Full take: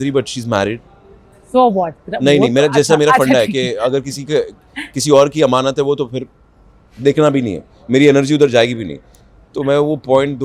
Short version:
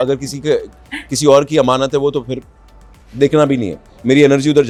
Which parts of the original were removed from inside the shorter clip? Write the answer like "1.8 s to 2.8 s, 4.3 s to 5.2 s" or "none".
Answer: none

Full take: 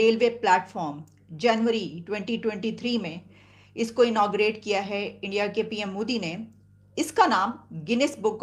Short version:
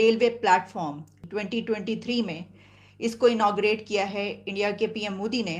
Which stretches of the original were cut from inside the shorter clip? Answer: 1.2 s to 2.0 s

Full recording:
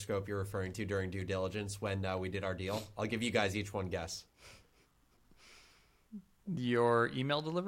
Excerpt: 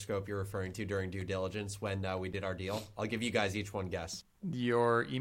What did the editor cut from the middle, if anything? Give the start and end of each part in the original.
4.2 s to 6.3 s

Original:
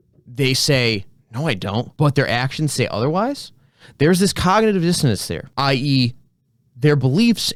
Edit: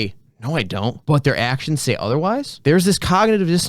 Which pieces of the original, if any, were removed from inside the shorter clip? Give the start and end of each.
3.4 s to 3.9 s

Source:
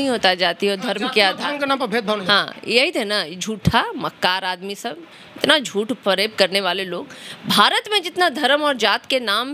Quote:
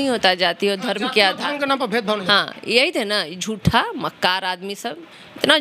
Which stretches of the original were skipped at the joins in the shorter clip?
none

